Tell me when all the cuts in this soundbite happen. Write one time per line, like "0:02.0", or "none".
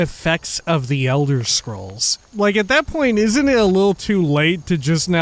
0:02.3